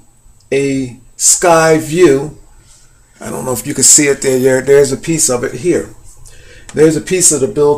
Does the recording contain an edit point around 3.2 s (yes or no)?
no